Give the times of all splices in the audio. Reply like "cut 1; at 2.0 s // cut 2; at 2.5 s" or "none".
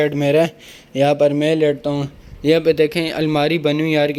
none